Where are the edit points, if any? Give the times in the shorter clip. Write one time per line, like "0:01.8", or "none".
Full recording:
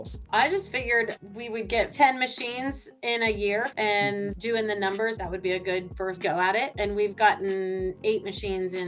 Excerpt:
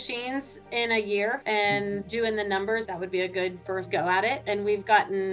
none